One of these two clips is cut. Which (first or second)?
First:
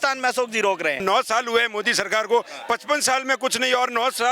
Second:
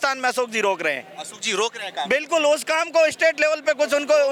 first